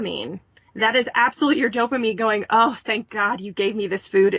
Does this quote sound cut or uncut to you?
uncut